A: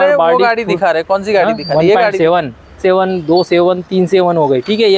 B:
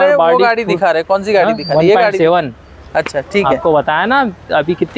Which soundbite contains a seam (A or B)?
A